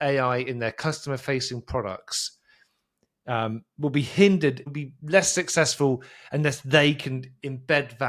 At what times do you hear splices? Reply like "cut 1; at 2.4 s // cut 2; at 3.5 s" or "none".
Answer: cut 1; at 4.8 s